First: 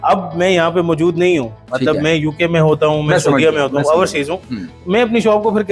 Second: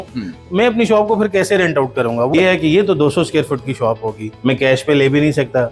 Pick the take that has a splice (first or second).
second